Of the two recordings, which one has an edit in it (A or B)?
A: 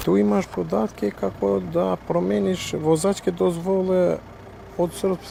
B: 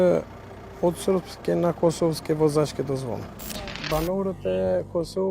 B